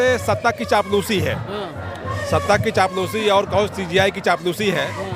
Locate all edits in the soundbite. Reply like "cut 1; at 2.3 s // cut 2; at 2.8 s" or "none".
none